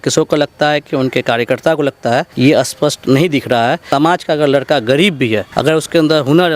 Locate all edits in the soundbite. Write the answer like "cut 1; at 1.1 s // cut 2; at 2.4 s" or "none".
cut 1; at 2.3 s // cut 2; at 3.8 s // cut 3; at 5.5 s